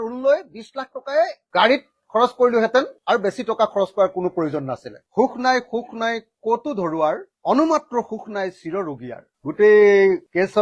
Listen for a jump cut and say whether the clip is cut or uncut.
cut